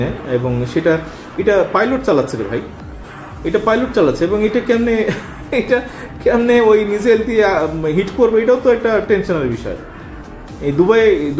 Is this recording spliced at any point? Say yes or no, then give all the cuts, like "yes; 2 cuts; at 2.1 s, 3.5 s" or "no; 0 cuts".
no; 0 cuts